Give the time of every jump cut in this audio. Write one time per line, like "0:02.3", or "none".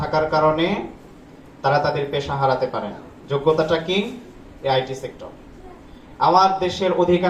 none